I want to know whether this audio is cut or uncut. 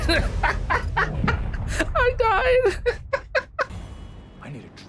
cut